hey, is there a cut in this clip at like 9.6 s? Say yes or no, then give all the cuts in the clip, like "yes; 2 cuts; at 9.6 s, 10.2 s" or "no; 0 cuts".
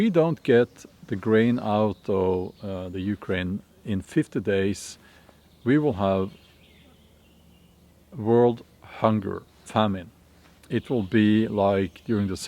yes; 2 cuts; at 9.6 s, 10.5 s